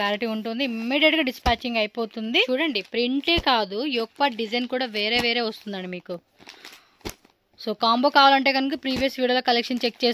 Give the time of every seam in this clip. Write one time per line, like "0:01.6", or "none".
0:02.5